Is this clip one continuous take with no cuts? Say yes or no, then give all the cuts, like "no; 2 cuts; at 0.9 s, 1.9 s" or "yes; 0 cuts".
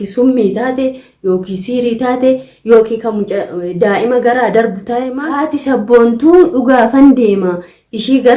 no; 1 cut; at 5.1 s